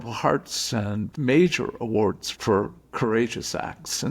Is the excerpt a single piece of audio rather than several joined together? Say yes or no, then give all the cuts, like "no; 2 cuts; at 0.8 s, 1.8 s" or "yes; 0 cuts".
no; 1 cut; at 1.1 s